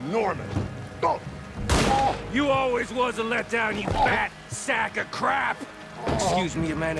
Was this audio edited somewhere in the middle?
no; 0 cuts

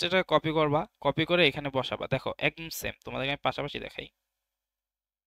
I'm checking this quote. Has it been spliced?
no; 0 cuts

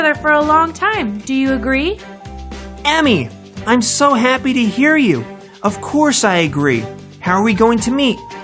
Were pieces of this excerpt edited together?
yes; 1 cut; at 5.0 s

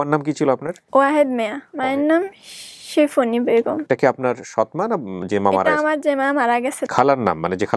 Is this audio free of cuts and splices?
no; 4 cuts; at 0.8 s, 1.6 s, 3.8 s, 6.8 s

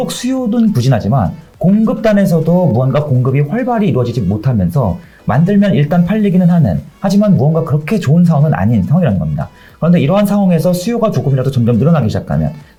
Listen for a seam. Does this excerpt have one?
no; 0 cuts

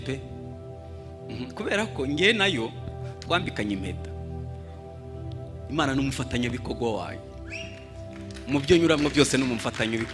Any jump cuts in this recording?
no; 0 cuts

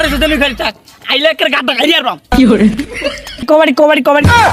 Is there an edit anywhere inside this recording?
yes; 1 cut; at 3.4 s

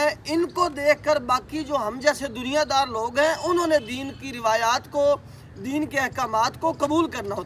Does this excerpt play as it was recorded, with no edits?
yes; 0 cuts

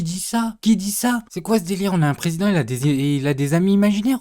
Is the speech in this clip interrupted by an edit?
no; 0 cuts

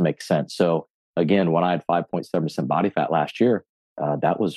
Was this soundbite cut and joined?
no; 0 cuts

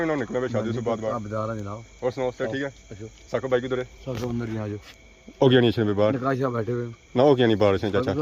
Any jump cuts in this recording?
no; 0 cuts

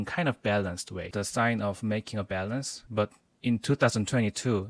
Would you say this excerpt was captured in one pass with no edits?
no; 2 cuts; at 1.0 s, 2.8 s

